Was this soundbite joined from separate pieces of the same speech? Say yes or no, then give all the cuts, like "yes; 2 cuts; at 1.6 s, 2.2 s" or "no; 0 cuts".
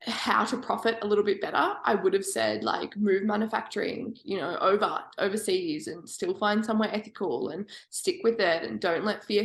no; 0 cuts